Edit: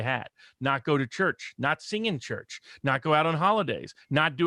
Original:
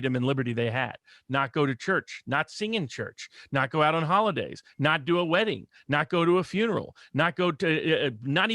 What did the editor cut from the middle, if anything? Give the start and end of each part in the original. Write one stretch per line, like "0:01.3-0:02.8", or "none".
none